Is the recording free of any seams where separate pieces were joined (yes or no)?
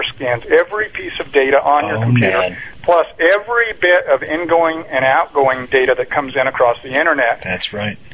yes